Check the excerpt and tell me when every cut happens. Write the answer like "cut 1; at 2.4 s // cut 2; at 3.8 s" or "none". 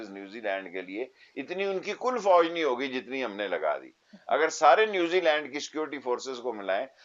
none